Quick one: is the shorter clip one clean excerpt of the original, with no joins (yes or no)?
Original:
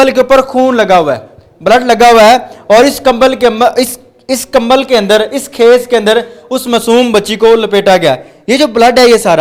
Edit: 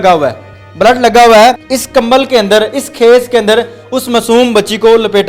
no